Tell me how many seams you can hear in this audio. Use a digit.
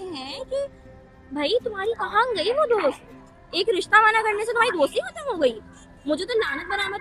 0